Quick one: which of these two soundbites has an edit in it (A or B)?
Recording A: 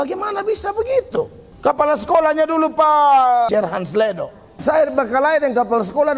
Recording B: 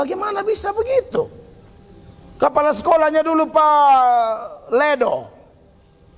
A